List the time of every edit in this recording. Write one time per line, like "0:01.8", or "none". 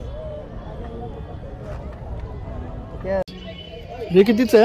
0:03.2